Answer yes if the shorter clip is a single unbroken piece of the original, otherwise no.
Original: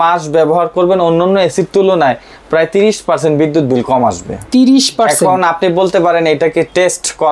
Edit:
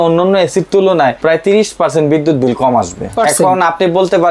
no